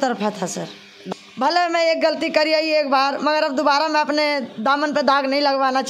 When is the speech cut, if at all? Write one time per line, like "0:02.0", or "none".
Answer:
0:00.9